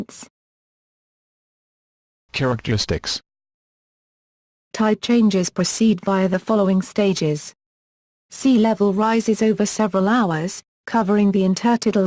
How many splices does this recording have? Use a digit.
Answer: 1